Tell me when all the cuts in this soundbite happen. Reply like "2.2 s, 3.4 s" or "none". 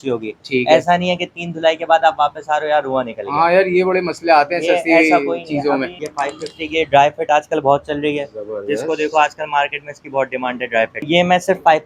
none